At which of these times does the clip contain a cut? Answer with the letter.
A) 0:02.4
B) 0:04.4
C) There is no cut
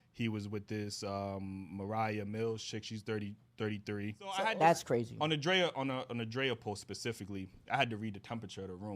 B